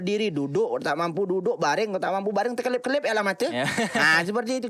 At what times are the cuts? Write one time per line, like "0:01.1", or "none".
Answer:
none